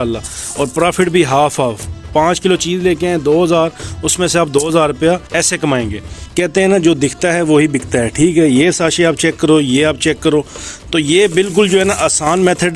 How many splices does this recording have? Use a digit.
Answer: 2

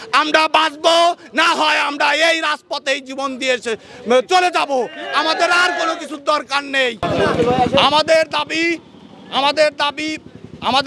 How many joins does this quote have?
0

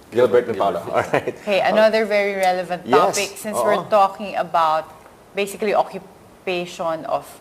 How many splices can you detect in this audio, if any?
1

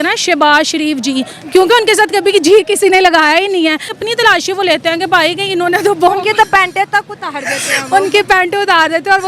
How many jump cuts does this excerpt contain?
1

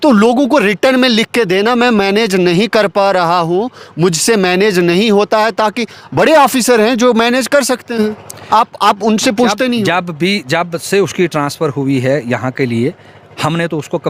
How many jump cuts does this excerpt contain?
0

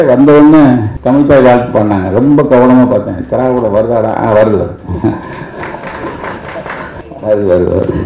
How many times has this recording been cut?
2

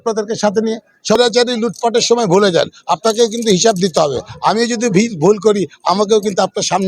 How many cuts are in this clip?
1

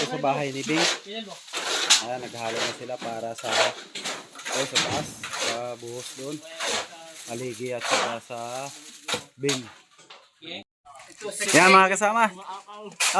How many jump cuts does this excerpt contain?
1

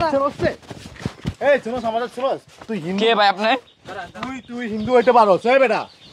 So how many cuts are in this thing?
0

